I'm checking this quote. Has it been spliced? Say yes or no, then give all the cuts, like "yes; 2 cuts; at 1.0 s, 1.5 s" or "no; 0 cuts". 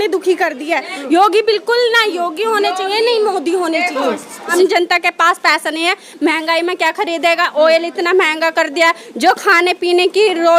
yes; 1 cut; at 4.4 s